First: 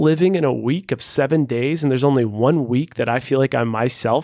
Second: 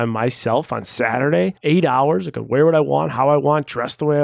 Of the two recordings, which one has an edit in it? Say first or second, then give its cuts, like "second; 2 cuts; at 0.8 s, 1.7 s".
second; 1 cut; at 1.6 s